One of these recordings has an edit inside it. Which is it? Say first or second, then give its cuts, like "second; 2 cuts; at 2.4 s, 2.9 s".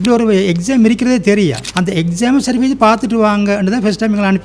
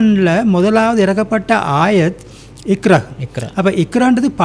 first; 1 cut; at 1.6 s